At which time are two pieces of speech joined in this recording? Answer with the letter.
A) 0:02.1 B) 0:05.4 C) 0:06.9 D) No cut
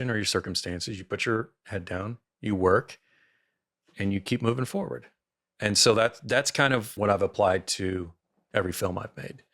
C